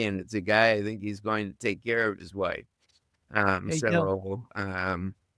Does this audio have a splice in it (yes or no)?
no